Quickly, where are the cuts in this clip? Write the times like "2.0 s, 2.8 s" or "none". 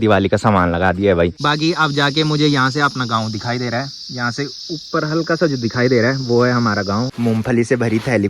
1.4 s, 7.1 s